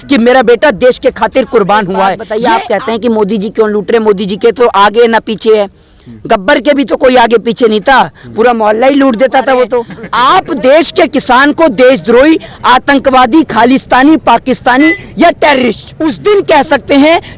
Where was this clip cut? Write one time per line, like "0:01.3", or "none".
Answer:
0:02.2
0:10.0
0:15.9

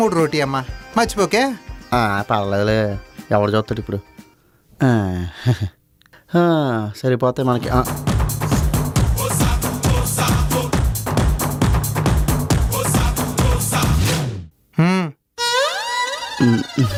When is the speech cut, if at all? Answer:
none

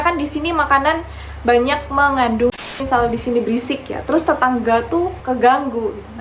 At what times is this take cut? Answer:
0:02.6
0:05.2

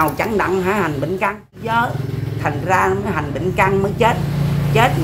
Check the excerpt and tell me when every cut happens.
0:01.8

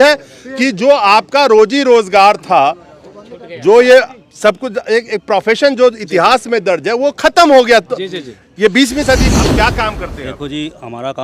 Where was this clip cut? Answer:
0:09.2

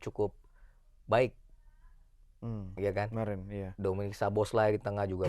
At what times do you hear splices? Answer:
none

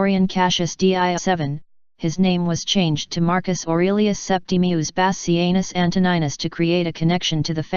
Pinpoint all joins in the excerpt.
none

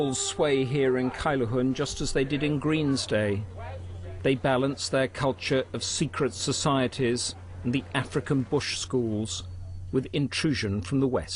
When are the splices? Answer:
0:02.0

